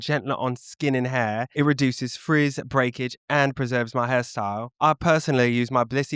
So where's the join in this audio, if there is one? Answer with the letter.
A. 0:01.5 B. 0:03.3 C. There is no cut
A